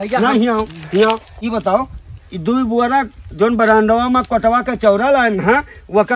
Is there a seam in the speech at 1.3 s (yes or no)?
yes